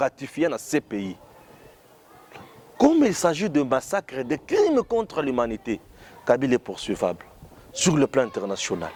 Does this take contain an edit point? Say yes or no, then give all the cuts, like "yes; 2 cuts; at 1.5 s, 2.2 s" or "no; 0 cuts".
no; 0 cuts